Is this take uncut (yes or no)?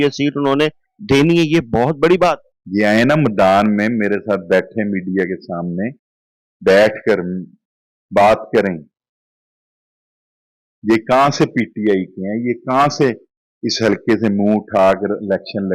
no